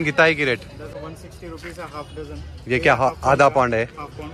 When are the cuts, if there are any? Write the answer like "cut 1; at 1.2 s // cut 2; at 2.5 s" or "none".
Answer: cut 1; at 0.9 s